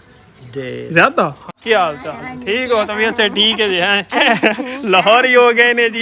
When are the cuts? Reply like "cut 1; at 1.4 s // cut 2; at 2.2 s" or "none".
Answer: cut 1; at 1.4 s